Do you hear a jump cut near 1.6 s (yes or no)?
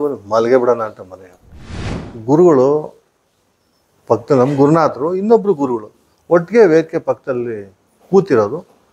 yes